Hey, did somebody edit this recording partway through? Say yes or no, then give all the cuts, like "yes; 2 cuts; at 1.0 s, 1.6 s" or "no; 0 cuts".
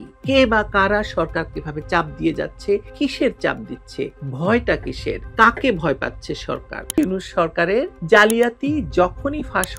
yes; 2 cuts; at 4.2 s, 7.0 s